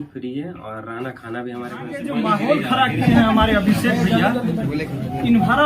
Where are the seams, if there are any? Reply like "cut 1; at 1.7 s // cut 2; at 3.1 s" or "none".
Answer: cut 1; at 2.0 s